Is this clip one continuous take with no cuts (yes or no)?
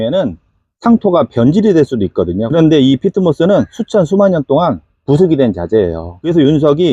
yes